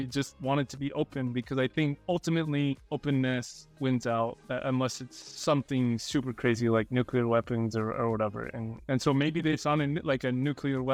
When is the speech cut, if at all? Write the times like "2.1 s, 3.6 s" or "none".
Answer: none